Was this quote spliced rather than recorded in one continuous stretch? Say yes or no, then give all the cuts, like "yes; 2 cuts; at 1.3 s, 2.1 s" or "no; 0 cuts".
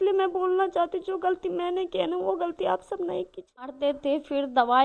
yes; 1 cut; at 3.7 s